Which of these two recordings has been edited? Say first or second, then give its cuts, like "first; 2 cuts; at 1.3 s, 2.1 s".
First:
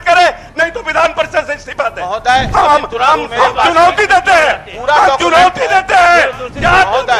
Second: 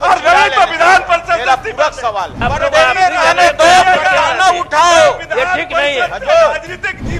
second; 1 cut; at 2.4 s